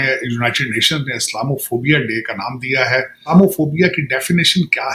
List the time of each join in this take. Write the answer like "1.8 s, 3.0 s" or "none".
3.2 s